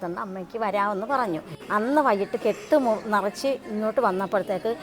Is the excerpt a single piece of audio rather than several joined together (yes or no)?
no